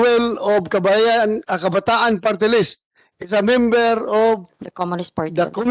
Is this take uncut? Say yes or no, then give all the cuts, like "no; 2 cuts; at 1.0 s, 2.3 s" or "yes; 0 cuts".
yes; 0 cuts